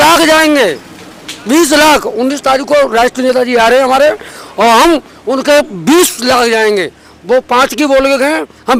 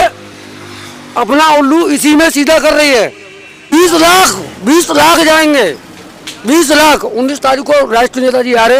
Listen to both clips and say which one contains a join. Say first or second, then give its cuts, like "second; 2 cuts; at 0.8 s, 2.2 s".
second; 1 cut; at 3.6 s